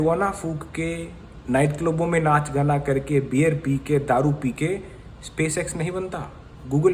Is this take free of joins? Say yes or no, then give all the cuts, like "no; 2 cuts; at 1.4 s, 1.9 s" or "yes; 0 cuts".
yes; 0 cuts